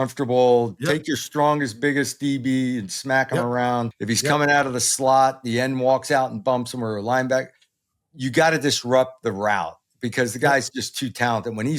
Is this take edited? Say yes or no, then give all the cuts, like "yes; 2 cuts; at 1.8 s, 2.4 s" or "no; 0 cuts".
yes; 1 cut; at 3.9 s